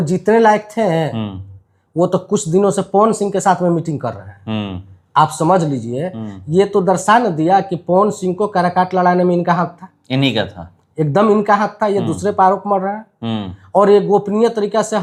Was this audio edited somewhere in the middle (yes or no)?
no